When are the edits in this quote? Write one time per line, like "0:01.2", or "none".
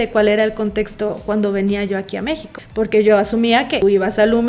0:02.6
0:03.8